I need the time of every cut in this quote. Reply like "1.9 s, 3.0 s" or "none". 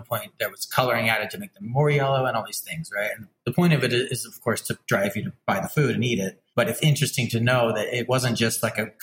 3.3 s, 5.3 s, 6.4 s, 8.1 s